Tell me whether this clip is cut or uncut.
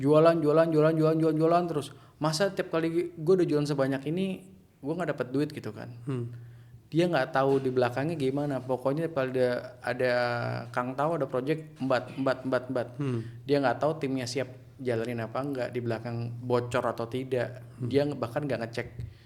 uncut